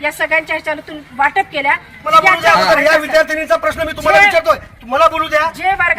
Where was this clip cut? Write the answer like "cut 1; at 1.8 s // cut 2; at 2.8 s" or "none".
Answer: cut 1; at 2.1 s